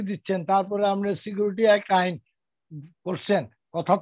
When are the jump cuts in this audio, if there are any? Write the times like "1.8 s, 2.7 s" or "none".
none